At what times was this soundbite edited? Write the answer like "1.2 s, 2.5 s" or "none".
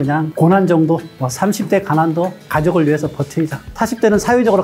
1.1 s, 2.4 s